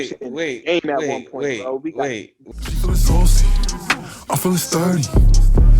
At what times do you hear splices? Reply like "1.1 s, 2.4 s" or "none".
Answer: 2.4 s